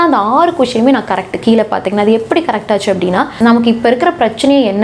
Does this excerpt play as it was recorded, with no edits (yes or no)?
no